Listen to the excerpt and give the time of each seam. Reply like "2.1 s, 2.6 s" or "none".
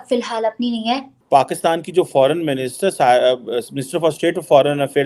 1.1 s